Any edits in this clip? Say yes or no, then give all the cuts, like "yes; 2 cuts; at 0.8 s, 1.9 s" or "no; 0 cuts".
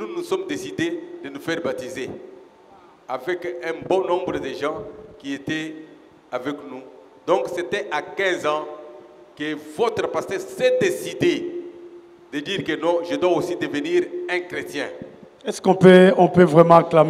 no; 0 cuts